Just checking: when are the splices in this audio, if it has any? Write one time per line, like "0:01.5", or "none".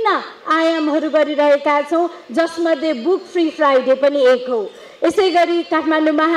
none